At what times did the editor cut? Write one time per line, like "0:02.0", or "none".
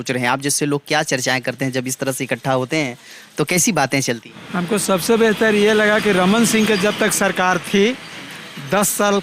0:04.4

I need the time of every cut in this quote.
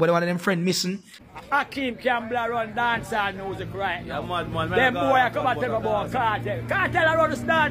0:01.1

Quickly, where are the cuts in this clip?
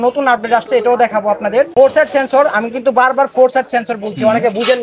0:01.7

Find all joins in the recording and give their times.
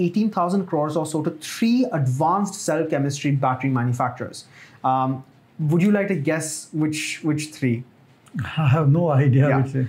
none

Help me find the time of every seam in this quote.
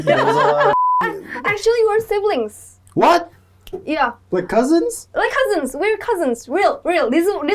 0:01.0
0:03.3

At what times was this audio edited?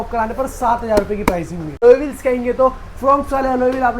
0:01.8

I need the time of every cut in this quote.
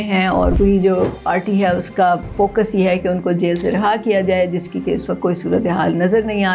none

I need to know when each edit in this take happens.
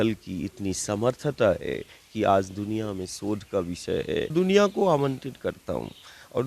0:04.3

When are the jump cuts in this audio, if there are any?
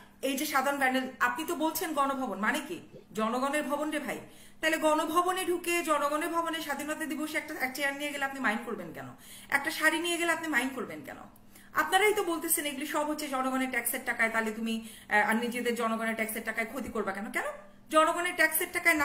none

